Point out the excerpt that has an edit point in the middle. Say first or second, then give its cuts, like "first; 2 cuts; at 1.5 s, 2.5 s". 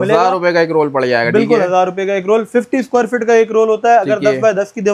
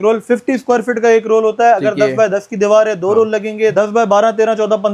second; 1 cut; at 3.7 s